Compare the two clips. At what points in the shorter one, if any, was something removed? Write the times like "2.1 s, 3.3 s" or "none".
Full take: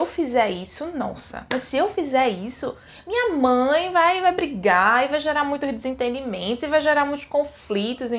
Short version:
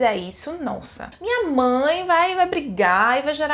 1.0 s